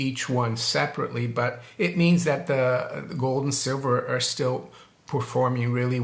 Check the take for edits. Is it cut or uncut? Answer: uncut